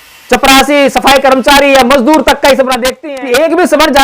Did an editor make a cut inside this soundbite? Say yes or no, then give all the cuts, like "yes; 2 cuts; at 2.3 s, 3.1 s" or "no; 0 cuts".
yes; 1 cut; at 2.9 s